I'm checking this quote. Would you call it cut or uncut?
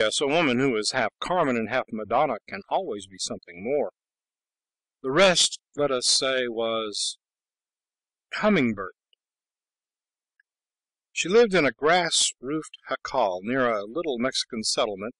uncut